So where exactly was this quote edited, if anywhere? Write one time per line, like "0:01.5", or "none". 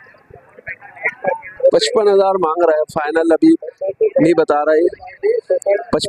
none